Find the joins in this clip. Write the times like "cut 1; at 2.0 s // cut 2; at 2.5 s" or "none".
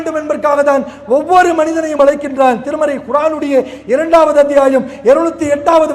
none